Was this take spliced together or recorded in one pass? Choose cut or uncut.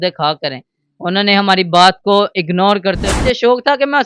cut